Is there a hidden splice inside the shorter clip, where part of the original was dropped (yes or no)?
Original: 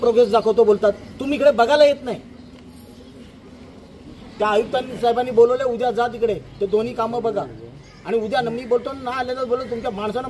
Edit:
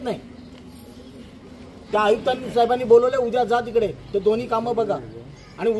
yes